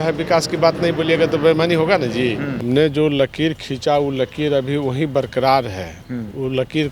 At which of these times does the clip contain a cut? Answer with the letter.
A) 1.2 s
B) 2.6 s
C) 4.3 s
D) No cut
B